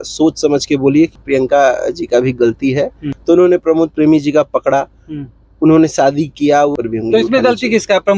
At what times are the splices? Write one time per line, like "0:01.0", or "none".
0:01.1
0:03.1
0:06.7